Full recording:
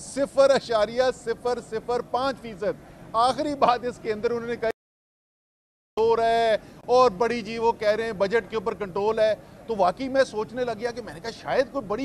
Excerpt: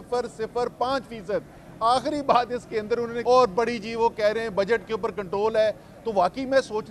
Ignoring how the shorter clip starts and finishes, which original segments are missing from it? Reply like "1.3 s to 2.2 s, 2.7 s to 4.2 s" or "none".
4.5 s to 6.8 s

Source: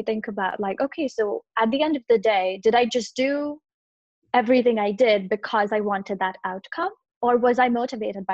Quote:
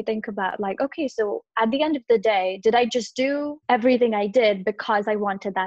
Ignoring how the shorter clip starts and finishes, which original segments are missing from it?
3.5 s to 4.2 s

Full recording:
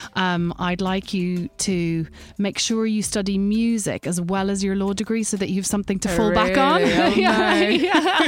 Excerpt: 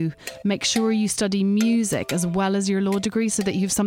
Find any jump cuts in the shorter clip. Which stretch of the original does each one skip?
none

